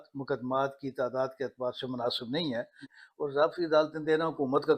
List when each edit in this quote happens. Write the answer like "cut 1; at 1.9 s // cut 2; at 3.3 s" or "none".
cut 1; at 2.8 s